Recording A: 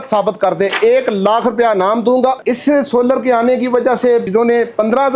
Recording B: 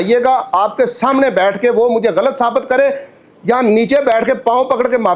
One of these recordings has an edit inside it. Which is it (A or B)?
A